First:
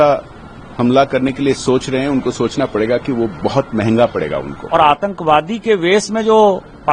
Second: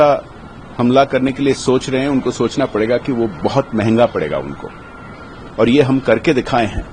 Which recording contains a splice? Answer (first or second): first